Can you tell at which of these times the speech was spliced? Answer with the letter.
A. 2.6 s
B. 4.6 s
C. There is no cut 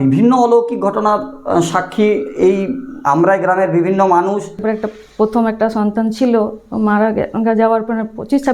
B